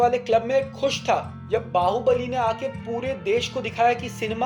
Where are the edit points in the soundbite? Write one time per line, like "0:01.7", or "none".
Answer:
none